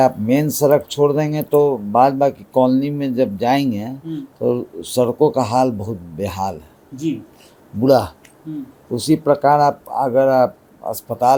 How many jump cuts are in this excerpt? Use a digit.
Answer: 0